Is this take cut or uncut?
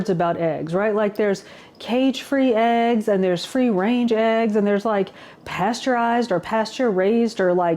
uncut